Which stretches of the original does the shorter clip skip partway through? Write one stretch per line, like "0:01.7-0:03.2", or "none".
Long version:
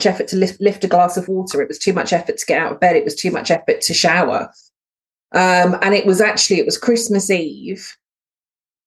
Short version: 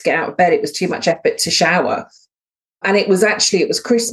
0:05.3-0:05.8